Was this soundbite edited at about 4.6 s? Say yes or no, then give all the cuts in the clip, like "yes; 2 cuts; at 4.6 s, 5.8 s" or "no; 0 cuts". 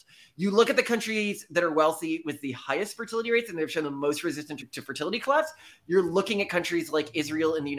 yes; 1 cut; at 4.6 s